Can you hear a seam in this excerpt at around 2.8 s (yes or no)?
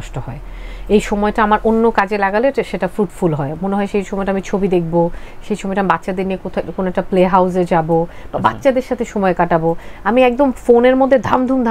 no